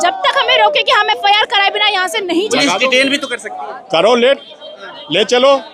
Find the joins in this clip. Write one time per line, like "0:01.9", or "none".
0:02.5